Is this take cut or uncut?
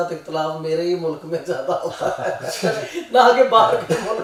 uncut